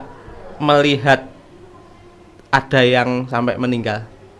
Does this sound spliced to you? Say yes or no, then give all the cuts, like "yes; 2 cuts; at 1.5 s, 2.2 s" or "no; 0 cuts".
no; 0 cuts